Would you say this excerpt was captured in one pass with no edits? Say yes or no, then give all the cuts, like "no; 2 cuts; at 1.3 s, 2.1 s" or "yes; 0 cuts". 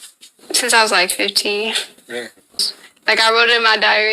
no; 1 cut; at 2.7 s